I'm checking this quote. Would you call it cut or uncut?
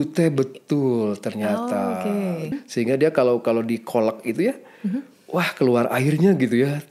cut